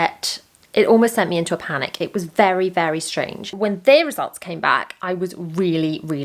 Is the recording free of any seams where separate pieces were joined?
no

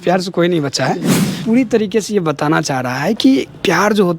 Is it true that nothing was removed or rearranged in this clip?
no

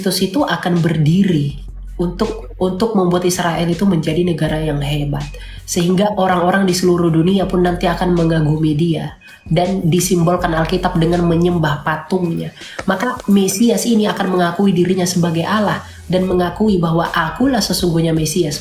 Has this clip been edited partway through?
no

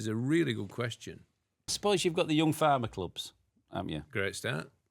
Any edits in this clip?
yes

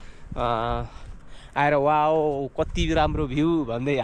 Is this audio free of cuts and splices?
yes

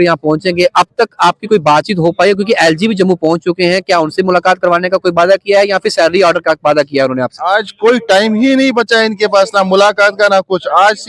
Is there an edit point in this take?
no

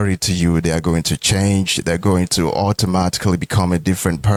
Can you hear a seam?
no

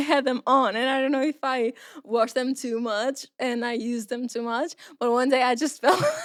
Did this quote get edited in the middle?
no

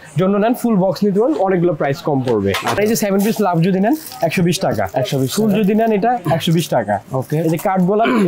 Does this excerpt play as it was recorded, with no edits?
no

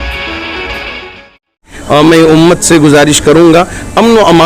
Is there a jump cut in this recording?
yes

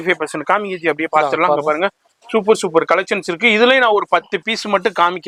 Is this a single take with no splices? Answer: yes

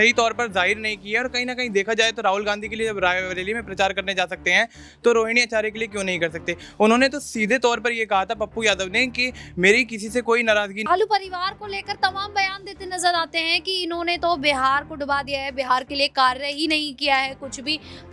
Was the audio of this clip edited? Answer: yes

